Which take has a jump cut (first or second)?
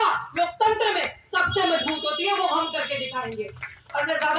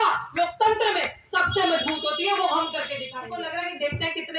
second